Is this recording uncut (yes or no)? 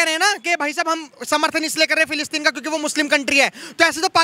yes